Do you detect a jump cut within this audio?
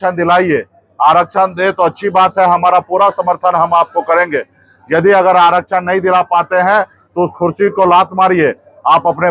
no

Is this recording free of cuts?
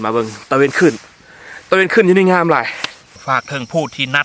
no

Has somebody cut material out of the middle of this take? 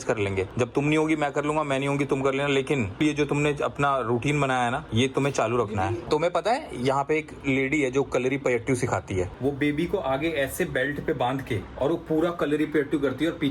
yes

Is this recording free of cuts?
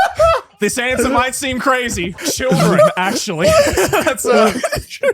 no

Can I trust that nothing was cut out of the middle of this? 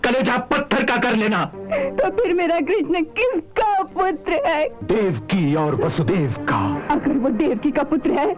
no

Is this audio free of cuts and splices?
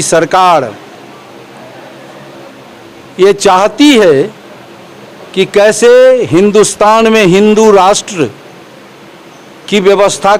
yes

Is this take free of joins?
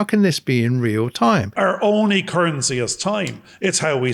no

